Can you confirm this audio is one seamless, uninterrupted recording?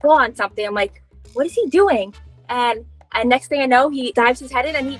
no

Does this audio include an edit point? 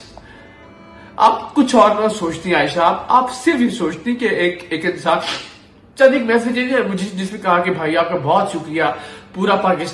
no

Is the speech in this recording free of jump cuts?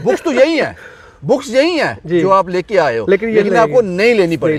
yes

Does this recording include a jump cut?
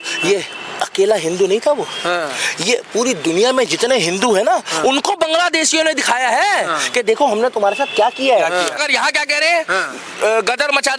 yes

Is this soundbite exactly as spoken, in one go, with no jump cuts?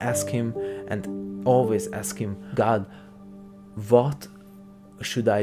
no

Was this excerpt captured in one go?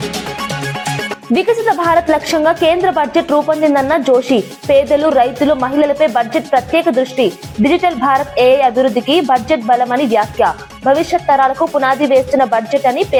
yes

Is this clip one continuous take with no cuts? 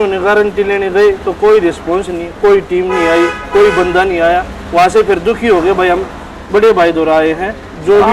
yes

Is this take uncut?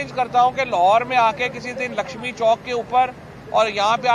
yes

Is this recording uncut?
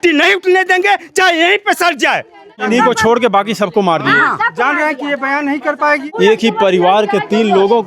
no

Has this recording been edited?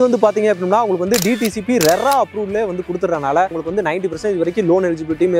yes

